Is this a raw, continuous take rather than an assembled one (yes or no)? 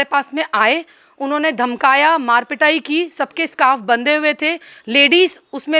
yes